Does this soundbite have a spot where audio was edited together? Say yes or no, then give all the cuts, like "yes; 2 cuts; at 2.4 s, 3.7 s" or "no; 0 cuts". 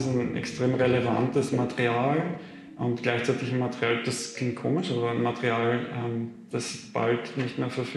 no; 0 cuts